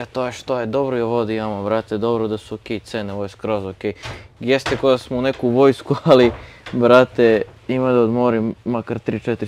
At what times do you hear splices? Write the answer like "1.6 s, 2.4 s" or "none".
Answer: none